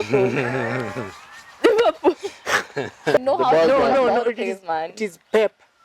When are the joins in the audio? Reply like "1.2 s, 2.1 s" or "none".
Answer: 3.2 s